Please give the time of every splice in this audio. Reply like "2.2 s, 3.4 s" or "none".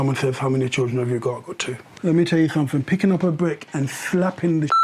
2.0 s

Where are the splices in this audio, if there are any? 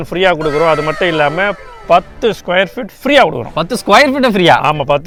none

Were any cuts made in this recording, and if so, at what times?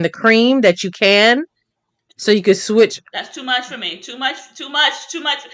none

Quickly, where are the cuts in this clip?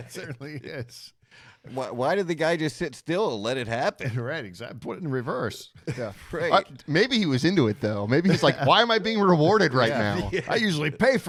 none

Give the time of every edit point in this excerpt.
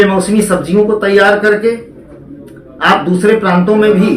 none

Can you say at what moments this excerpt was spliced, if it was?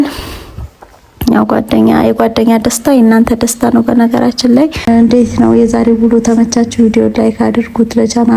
4.9 s

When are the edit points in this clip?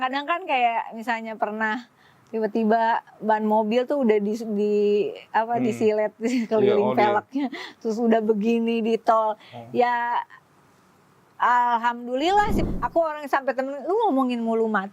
12.6 s

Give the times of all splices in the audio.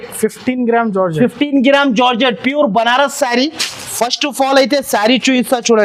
none

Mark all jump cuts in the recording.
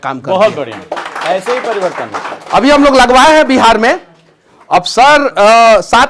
none

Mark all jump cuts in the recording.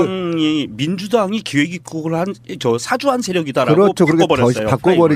none

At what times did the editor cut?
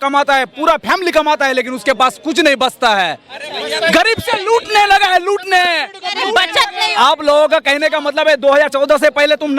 6.9 s

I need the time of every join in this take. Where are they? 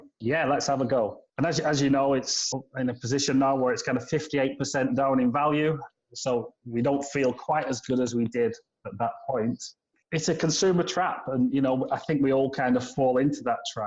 1.2 s

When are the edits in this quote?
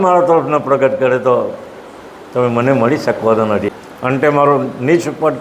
3.7 s

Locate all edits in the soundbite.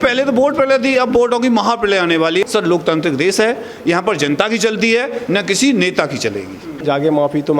2.4 s, 6.7 s

